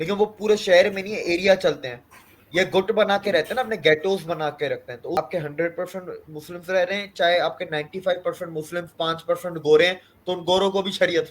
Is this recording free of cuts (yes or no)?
no